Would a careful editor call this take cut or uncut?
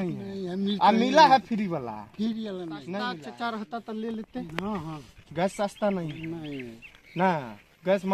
cut